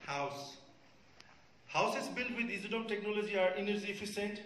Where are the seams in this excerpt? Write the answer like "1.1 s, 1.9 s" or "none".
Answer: none